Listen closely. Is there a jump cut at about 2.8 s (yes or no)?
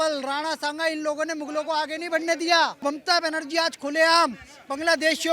yes